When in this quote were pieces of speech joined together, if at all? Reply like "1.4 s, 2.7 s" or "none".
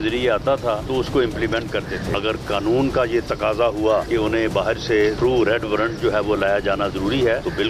none